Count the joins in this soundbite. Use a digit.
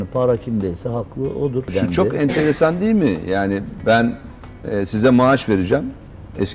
0